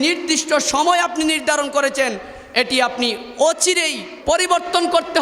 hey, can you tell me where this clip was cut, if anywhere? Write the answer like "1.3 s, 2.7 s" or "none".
4.1 s